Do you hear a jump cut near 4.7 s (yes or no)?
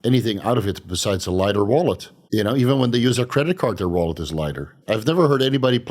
yes